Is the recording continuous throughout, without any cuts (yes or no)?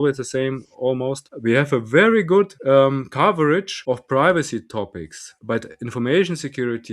no